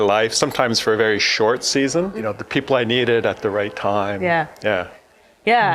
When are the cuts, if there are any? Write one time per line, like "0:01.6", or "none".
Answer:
0:02.1